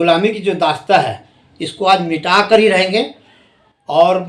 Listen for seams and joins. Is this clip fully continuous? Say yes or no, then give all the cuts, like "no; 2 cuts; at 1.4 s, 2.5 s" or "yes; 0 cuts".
yes; 0 cuts